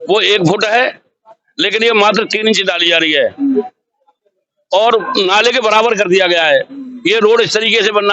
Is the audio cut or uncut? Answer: uncut